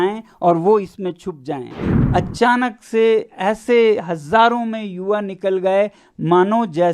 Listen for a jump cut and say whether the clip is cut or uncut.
cut